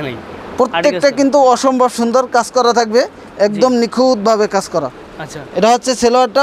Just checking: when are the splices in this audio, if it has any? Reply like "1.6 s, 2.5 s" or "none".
none